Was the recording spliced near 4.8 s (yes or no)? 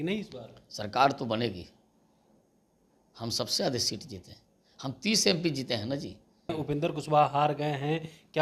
no